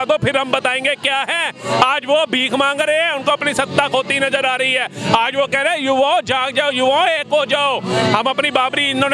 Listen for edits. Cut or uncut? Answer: uncut